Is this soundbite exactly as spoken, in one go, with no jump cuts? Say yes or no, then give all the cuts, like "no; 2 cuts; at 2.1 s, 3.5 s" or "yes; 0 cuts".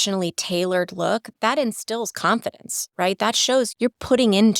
no; 2 cuts; at 1.3 s, 3.7 s